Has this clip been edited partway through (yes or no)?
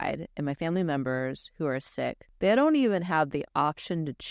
yes